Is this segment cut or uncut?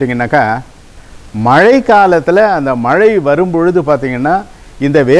uncut